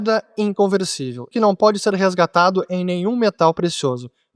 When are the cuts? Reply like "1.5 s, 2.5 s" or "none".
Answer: 1.3 s